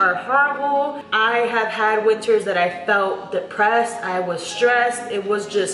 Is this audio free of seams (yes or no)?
yes